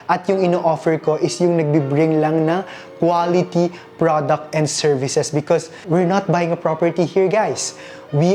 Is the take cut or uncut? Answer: cut